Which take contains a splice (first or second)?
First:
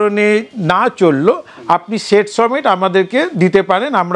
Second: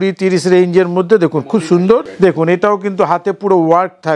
second